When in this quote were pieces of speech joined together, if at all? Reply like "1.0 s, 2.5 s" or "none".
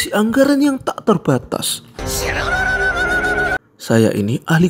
3.7 s